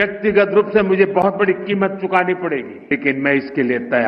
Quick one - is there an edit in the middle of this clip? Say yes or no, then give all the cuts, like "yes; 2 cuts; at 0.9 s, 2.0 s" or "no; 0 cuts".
yes; 1 cut; at 2.9 s